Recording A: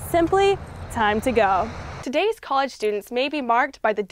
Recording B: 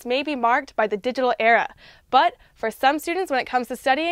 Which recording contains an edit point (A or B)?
A